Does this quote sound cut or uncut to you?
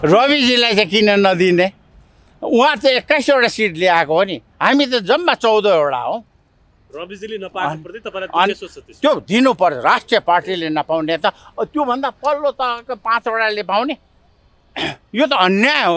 uncut